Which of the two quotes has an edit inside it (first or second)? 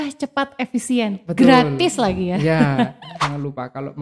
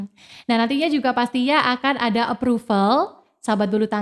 first